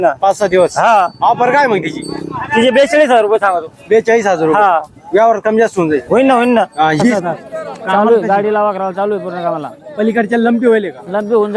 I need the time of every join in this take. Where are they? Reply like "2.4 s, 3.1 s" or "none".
7.2 s